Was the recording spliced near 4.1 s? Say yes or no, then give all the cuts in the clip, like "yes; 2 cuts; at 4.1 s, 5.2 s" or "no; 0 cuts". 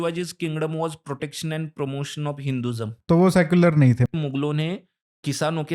yes; 2 cuts; at 3.0 s, 4.1 s